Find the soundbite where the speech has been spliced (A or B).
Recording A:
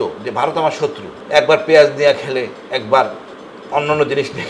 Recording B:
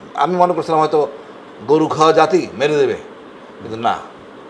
A